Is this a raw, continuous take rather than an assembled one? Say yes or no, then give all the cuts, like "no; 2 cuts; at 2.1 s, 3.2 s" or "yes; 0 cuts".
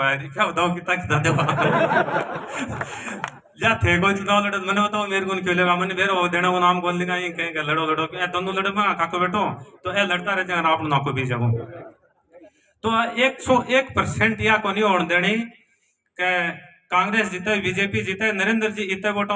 yes; 0 cuts